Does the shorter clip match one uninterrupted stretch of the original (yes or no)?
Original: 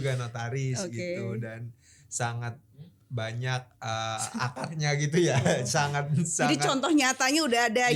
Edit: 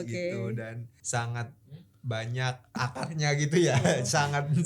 no